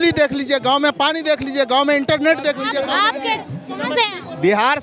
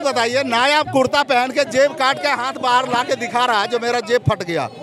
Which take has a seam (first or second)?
first